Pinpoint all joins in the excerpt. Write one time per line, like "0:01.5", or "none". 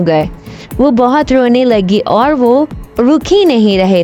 none